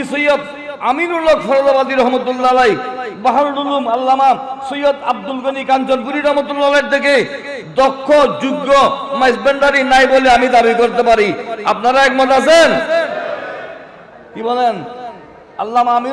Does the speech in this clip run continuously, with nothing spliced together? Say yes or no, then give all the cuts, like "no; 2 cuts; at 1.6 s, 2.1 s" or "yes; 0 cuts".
yes; 0 cuts